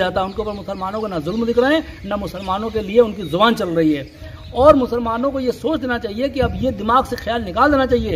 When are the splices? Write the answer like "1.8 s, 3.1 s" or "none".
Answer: 4.4 s